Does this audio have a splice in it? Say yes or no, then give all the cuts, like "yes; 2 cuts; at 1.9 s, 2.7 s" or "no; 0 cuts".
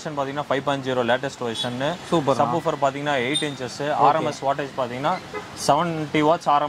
no; 0 cuts